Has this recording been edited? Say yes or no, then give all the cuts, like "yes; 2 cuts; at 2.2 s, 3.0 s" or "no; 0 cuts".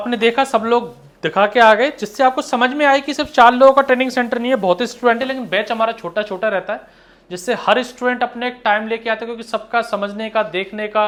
no; 0 cuts